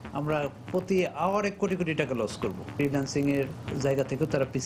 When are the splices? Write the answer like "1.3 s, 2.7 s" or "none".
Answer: 2.7 s